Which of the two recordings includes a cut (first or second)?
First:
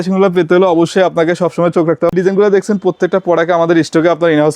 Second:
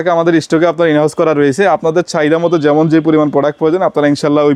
first